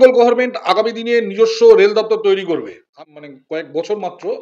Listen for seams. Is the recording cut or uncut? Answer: cut